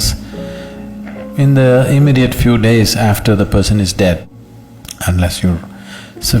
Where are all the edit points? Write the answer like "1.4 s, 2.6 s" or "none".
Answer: 4.2 s